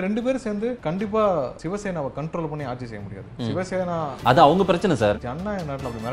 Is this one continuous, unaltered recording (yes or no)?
no